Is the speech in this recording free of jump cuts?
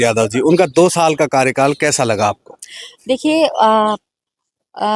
yes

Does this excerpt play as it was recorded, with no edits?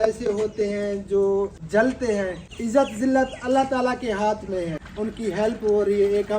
no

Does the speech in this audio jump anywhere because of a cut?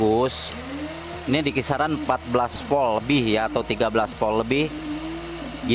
no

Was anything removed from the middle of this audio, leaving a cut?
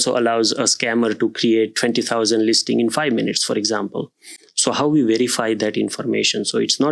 no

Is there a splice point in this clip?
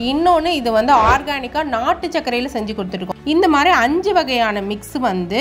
yes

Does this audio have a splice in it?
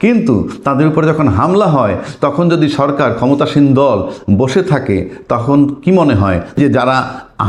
no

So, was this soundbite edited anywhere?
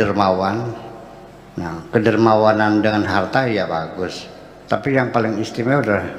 no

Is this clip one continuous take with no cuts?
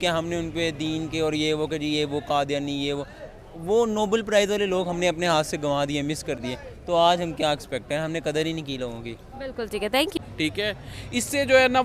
yes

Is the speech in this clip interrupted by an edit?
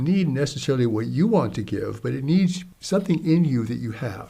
yes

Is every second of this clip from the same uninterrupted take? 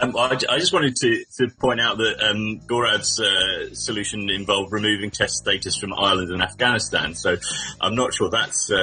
yes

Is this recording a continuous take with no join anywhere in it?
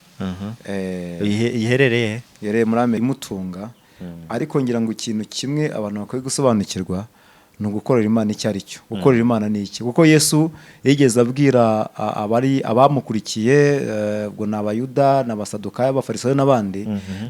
no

